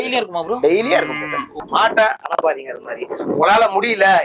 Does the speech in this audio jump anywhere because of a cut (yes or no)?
yes